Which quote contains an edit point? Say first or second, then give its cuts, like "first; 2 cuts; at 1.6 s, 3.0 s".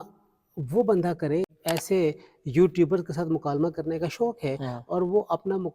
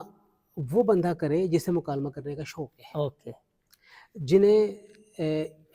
first; 1 cut; at 1.5 s